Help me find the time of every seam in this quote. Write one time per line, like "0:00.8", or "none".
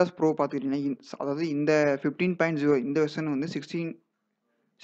none